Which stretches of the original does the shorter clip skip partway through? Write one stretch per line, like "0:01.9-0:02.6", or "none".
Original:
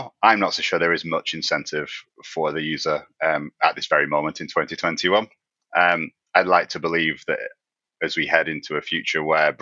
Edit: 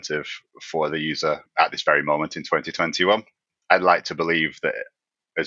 0:03.1-0:03.5
0:05.5-0:06.1